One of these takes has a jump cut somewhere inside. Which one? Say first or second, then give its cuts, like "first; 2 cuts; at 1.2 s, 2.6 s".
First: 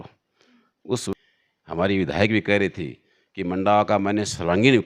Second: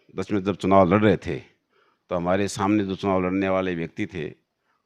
first; 1 cut; at 1.0 s